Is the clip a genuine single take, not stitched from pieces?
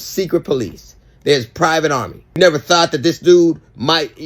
no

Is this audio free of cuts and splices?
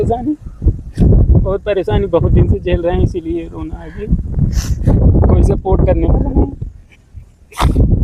yes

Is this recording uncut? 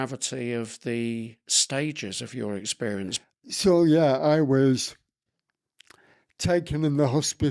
no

